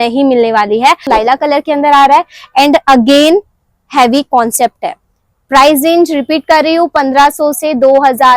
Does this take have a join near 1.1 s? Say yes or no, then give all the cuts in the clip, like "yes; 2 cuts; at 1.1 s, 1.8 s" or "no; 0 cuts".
yes; 1 cut; at 1.1 s